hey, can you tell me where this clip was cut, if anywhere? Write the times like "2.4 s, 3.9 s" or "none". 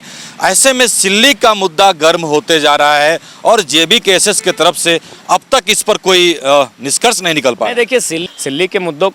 8.2 s